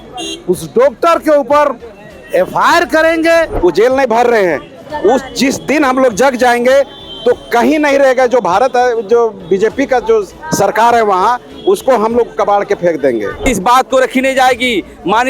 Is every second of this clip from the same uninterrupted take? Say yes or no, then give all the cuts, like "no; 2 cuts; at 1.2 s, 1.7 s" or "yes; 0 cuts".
no; 2 cuts; at 3.5 s, 13.4 s